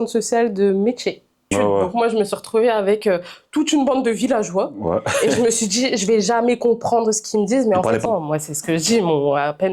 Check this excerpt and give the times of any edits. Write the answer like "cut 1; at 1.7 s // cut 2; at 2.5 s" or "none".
cut 1; at 1.5 s // cut 2; at 8.0 s